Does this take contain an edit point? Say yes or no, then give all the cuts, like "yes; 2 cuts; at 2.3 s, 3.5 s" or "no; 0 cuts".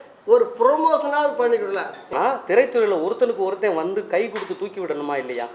yes; 1 cut; at 2.1 s